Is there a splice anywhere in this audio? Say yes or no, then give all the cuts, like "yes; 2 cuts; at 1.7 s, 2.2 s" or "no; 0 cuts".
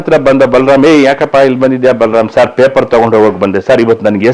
no; 0 cuts